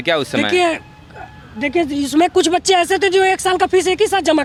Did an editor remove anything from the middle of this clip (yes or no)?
no